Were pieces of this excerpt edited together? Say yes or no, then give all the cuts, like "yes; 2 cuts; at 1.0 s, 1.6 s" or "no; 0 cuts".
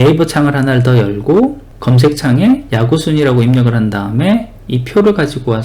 yes; 1 cut; at 2.7 s